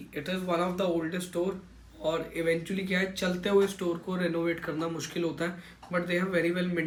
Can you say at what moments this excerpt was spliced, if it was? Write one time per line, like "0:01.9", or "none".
none